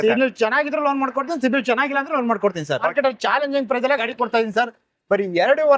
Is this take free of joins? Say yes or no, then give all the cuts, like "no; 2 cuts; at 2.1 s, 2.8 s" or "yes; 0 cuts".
no; 1 cut; at 2.9 s